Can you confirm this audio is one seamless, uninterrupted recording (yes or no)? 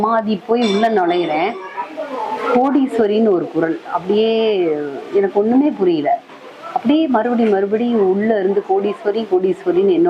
yes